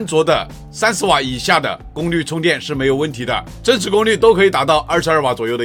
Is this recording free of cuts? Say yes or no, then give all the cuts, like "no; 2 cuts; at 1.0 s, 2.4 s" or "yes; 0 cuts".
yes; 0 cuts